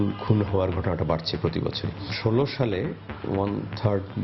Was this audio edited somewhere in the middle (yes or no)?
no